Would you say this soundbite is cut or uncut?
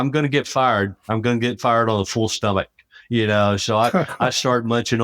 uncut